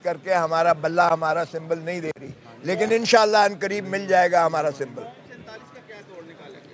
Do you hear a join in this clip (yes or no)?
no